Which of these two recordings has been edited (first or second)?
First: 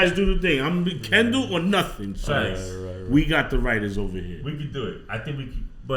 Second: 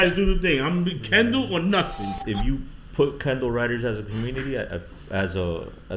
second